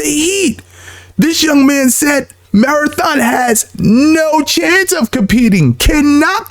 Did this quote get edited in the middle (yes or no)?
no